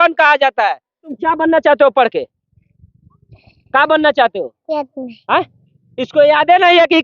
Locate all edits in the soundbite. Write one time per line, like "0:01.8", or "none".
0:01.1

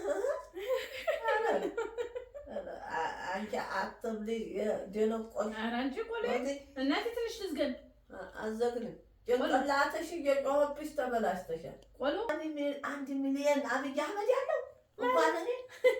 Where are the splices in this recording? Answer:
0:12.3

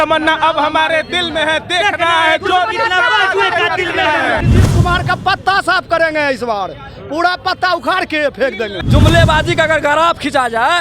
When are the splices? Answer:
0:04.4
0:08.8

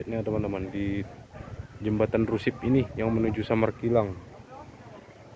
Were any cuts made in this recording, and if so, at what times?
none

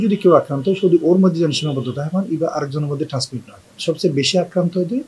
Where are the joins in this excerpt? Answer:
none

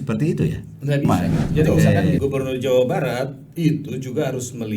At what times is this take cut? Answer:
0:02.2

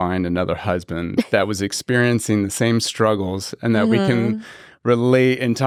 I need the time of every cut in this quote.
none

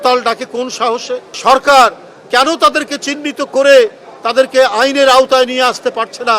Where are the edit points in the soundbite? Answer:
0:01.2

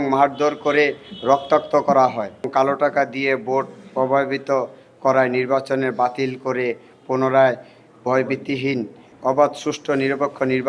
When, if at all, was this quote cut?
0:02.5
0:09.1

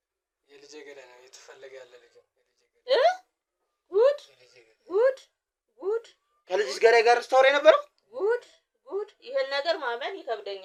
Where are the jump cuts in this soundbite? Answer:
none

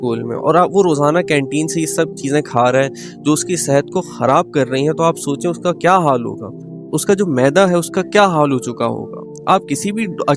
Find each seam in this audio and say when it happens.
none

